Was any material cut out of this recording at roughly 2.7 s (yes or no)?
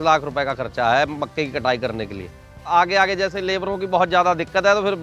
yes